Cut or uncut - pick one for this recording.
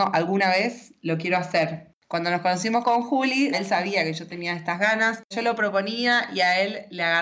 cut